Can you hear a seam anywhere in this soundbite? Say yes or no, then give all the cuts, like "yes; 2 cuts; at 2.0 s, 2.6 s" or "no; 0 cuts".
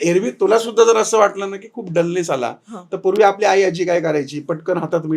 no; 0 cuts